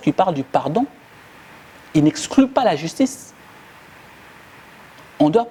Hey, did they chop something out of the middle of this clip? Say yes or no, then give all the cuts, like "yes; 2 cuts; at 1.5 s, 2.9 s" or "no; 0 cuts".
no; 0 cuts